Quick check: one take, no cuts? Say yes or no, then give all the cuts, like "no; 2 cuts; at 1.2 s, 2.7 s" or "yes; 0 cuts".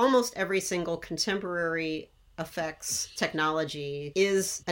yes; 0 cuts